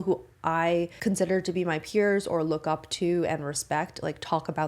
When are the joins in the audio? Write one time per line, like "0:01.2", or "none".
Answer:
0:00.9